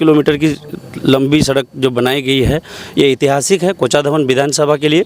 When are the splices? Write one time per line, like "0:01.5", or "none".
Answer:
none